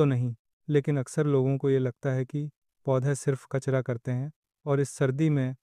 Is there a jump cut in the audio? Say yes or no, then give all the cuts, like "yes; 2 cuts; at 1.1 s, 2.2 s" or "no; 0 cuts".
yes; 1 cut; at 4.5 s